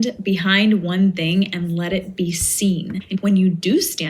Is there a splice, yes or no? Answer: yes